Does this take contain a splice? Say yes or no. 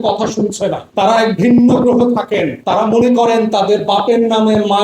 yes